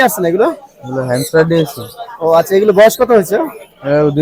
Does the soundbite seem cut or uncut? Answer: uncut